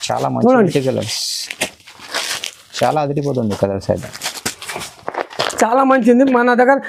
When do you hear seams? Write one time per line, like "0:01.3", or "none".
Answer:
none

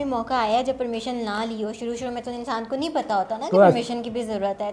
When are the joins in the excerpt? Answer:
none

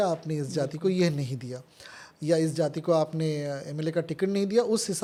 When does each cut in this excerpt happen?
none

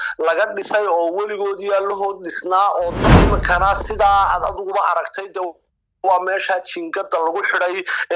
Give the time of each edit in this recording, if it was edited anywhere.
0:03.1

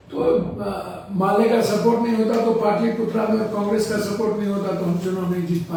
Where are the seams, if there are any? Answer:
none

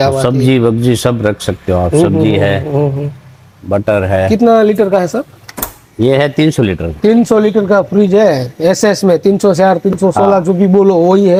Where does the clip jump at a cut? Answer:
none

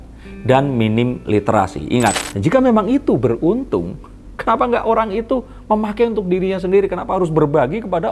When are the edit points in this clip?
0:02.2

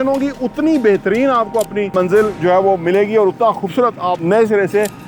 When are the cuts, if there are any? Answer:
0:01.9
0:04.2

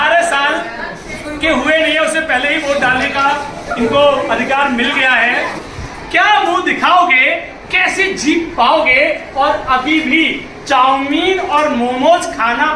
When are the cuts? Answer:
0:05.6

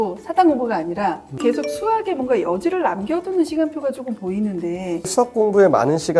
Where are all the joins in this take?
0:05.0

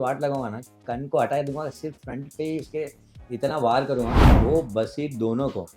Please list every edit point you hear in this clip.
0:04.2

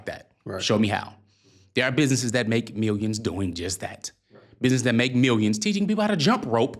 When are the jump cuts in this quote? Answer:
none

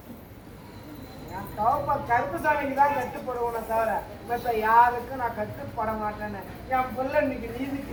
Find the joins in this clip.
none

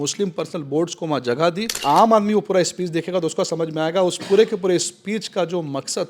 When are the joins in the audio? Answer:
0:01.8

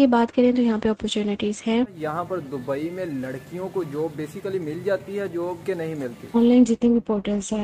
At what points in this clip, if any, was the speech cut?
0:02.0
0:06.4

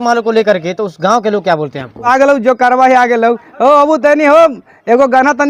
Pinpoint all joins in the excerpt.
0:02.1

